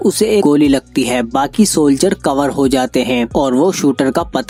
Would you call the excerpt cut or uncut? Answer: uncut